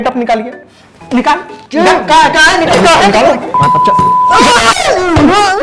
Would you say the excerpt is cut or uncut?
uncut